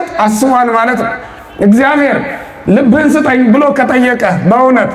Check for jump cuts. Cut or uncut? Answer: uncut